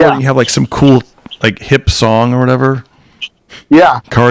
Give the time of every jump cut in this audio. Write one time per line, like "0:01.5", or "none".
none